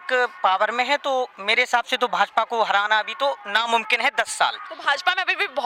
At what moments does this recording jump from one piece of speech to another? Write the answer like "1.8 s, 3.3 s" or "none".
none